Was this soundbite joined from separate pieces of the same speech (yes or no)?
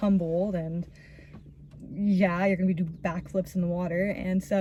no